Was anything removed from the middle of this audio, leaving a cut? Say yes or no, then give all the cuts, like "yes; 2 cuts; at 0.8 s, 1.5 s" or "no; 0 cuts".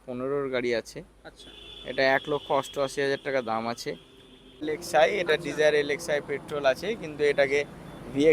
yes; 1 cut; at 4.7 s